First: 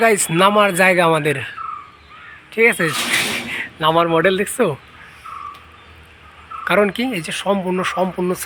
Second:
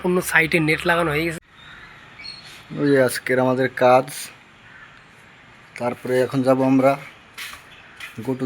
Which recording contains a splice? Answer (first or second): second